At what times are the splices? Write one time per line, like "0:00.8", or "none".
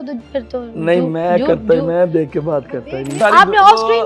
0:03.2